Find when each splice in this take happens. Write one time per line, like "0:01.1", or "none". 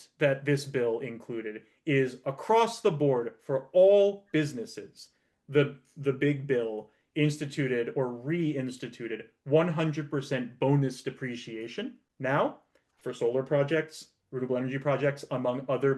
0:12.0